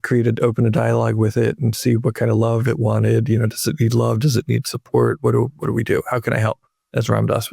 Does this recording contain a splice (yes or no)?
no